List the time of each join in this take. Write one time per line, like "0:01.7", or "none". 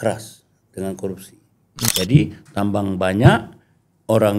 0:01.9